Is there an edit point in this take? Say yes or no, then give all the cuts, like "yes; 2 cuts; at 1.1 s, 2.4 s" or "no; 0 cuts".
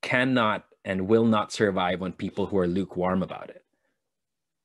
no; 0 cuts